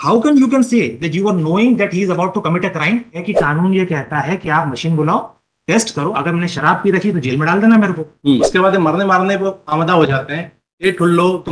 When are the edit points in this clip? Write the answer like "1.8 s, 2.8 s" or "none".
3.2 s, 8.1 s